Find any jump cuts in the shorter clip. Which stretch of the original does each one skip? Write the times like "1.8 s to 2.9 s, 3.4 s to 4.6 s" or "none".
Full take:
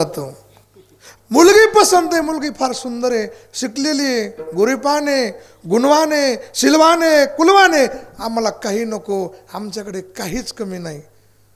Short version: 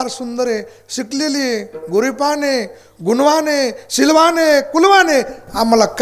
none